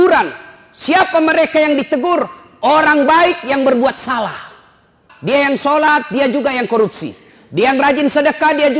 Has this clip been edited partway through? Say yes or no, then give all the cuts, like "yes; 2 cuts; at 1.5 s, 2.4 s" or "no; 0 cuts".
yes; 1 cut; at 5.1 s